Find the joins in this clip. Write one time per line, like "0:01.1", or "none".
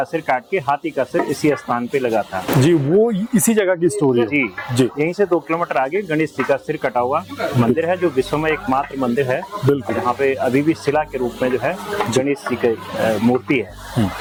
none